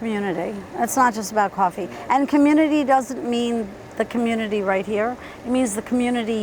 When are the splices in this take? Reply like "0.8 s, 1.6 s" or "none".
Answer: none